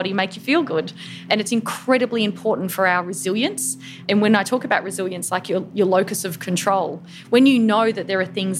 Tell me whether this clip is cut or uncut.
cut